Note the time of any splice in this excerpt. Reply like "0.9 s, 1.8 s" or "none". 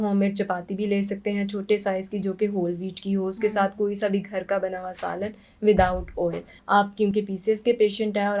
6.5 s